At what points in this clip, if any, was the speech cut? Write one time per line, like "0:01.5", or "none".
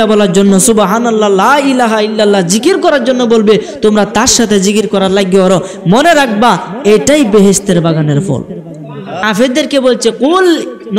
0:09.2